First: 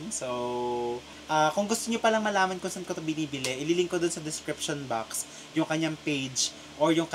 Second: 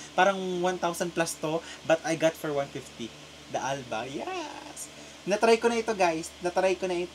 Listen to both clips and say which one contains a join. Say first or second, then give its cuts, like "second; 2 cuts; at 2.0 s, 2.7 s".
first; 1 cut; at 1.1 s